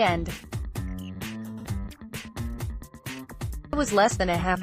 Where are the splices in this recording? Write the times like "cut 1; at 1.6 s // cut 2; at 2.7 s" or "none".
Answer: cut 1; at 0.9 s // cut 2; at 3.7 s